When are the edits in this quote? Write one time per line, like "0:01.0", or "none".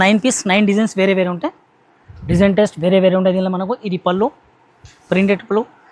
none